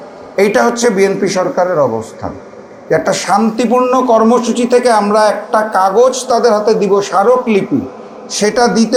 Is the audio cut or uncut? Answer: uncut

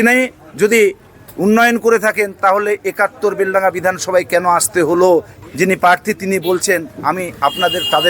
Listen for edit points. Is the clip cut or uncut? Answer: cut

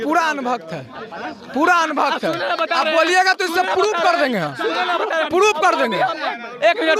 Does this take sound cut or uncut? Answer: uncut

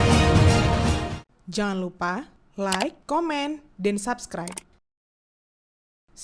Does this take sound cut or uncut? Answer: cut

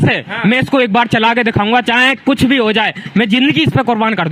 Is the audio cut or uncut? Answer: uncut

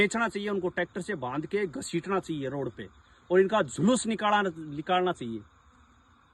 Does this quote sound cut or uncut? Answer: uncut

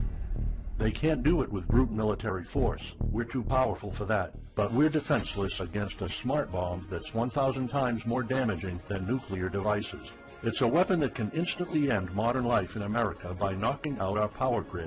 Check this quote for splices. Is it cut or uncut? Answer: cut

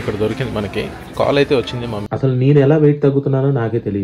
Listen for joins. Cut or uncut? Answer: cut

